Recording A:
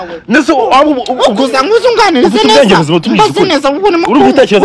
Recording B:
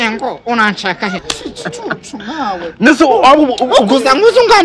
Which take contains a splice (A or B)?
B